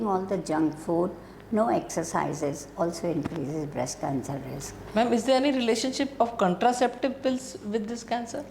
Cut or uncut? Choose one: cut